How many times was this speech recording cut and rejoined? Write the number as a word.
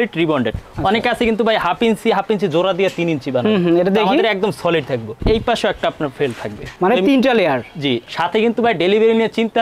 two